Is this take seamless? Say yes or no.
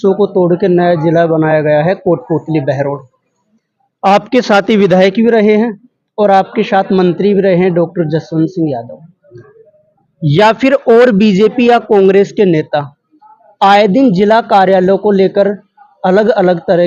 yes